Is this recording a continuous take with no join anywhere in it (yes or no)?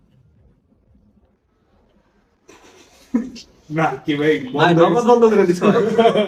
yes